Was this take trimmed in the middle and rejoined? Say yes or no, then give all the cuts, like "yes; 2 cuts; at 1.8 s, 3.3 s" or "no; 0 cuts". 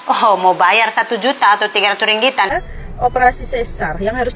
yes; 1 cut; at 2.5 s